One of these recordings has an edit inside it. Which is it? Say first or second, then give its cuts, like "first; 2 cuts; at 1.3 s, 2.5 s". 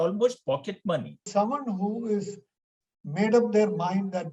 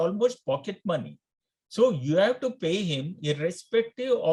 first; 1 cut; at 1.2 s